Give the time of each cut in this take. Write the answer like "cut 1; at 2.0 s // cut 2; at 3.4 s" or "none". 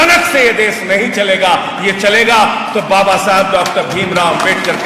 none